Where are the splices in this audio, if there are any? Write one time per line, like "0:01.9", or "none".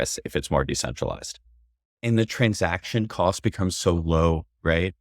0:01.8